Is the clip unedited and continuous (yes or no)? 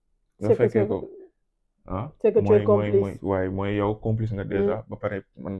yes